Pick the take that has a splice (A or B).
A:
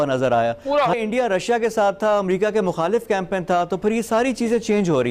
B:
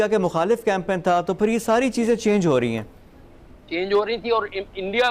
A